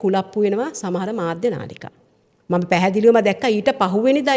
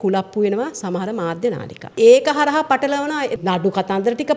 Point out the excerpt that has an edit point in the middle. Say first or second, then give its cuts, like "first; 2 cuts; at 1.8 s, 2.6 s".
second; 2 cuts; at 1.9 s, 3.4 s